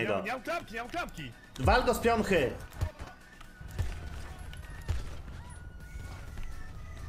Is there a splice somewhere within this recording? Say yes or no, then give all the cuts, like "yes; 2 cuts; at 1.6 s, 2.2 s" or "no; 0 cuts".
yes; 1 cut; at 4.6 s